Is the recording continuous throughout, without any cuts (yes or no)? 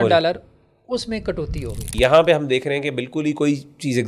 no